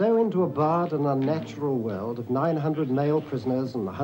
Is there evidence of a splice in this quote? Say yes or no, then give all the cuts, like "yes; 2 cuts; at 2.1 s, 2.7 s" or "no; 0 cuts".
no; 0 cuts